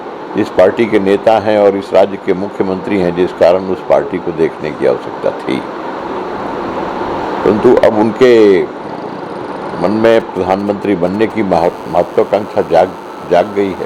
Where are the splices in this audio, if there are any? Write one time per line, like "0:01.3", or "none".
none